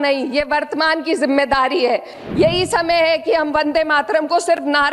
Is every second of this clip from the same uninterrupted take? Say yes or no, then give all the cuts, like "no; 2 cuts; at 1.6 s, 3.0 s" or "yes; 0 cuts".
no; 1 cut; at 2.2 s